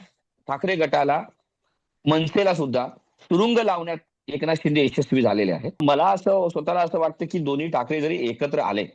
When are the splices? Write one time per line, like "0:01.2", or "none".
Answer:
0:05.8